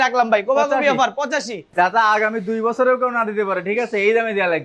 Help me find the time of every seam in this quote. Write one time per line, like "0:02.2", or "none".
0:01.6